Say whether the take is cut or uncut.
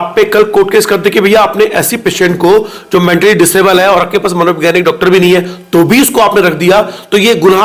uncut